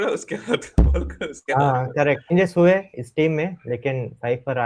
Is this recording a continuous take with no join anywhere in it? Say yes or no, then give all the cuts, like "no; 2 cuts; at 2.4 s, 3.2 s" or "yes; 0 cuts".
no; 1 cut; at 2.3 s